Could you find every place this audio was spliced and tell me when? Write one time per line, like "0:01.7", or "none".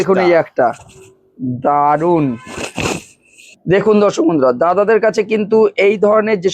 none

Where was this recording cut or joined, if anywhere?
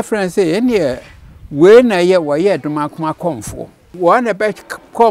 0:03.9

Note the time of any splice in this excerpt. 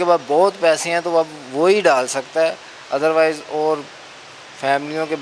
none

